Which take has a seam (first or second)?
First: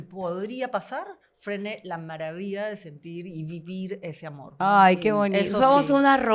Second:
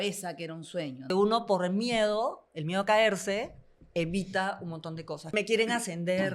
second